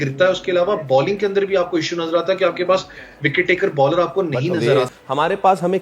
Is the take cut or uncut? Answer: cut